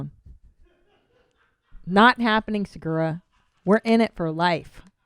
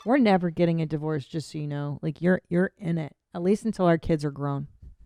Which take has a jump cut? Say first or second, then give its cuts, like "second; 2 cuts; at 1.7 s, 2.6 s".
first; 1 cut; at 2.2 s